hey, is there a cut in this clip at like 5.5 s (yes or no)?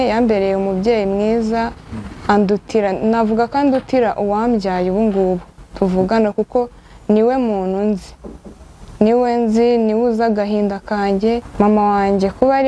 no